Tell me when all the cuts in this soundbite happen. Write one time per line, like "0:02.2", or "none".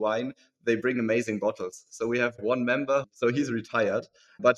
0:02.4